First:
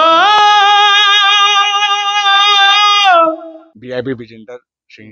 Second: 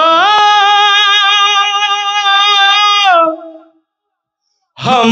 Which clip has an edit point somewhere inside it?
first; 1 cut; at 3.7 s

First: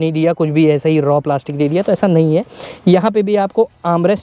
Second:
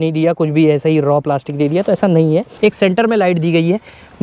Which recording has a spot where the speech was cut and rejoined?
second; 1 cut; at 2.5 s

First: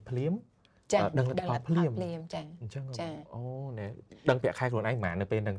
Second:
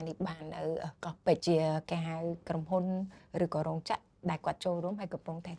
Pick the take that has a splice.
second; 1 cut; at 1.4 s

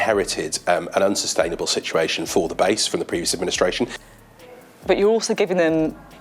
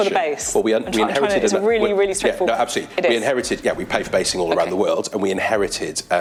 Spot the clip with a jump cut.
first; 1 cut; at 3.9 s

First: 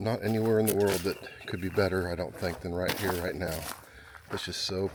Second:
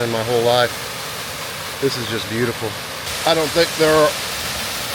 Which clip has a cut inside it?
second; 1 cut; at 3.0 s

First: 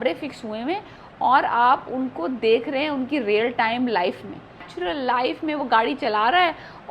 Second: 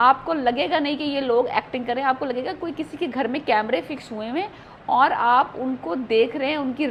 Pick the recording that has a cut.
first; 1 cut; at 4.7 s

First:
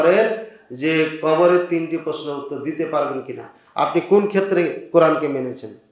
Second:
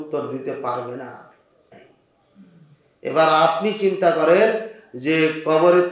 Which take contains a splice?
second; 1 cut; at 1.7 s

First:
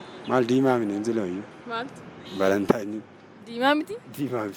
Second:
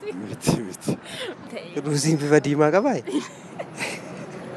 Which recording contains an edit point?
second; 1 cut; at 1.5 s

